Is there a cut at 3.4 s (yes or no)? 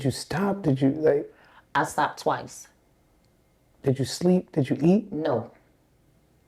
no